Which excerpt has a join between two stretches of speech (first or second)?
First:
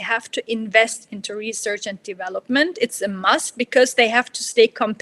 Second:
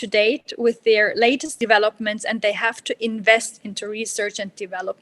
second